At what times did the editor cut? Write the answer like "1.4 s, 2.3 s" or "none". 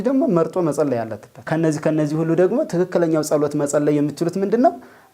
1.4 s